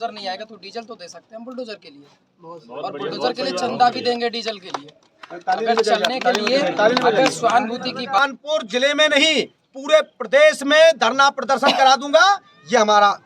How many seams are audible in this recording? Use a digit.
1